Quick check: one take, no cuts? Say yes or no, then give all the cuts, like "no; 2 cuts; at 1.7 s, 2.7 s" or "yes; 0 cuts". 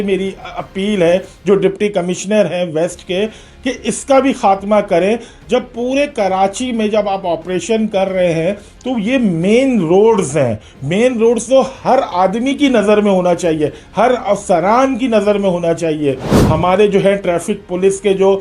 no; 1 cut; at 16.3 s